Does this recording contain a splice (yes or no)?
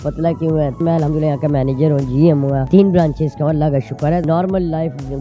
yes